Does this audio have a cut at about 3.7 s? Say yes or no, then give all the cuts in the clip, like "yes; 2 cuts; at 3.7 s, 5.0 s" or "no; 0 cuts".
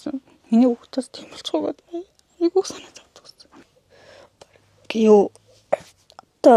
yes; 1 cut; at 3.7 s